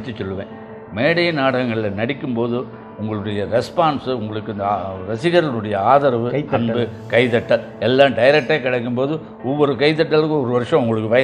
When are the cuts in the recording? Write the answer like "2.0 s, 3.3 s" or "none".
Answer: none